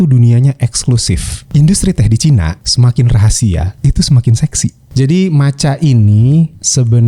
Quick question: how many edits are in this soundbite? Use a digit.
4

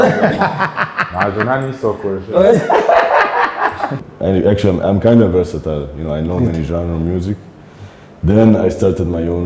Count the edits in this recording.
1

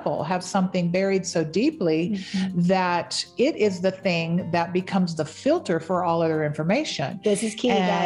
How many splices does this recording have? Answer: 0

